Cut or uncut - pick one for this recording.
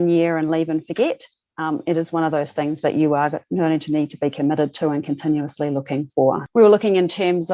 uncut